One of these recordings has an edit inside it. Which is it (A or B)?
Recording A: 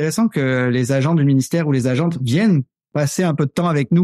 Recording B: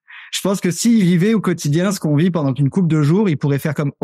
A